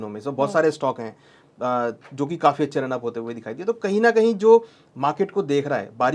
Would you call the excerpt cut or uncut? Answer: uncut